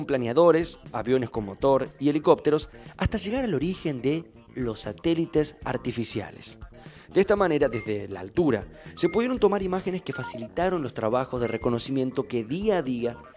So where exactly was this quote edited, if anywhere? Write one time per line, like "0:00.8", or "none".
0:06.8